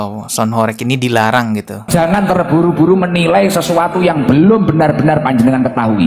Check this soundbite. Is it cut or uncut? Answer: uncut